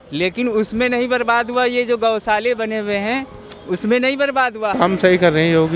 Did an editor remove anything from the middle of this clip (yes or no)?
yes